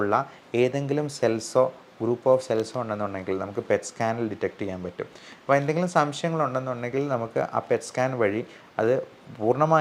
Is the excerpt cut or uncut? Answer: uncut